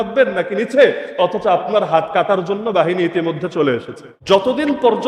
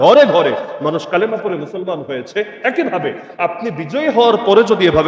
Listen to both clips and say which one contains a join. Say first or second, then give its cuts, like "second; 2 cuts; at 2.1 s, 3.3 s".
first; 1 cut; at 4.1 s